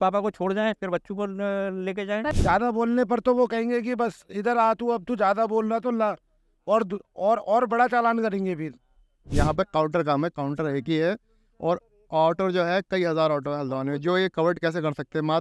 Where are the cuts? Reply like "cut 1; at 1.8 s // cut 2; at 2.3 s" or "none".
cut 1; at 2.3 s // cut 2; at 9.2 s